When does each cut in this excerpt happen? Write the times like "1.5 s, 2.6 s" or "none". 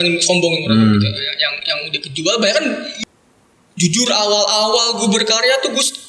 2.9 s